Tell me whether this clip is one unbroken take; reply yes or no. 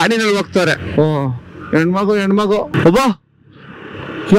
no